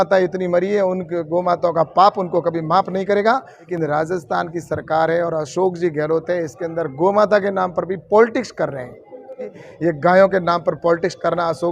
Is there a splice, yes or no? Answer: yes